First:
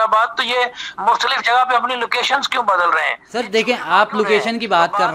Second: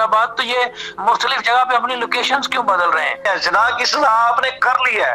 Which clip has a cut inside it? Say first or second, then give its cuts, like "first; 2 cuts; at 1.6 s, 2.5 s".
second; 1 cut; at 3.2 s